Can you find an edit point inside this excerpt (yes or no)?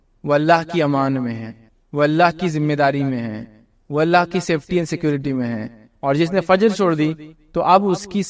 no